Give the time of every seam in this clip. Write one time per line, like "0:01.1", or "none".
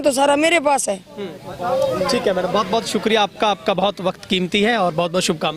none